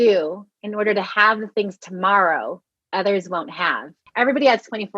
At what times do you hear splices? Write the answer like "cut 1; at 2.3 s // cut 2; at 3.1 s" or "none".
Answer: cut 1; at 4.0 s